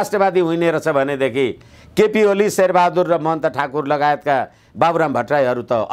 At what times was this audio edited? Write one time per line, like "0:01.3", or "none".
none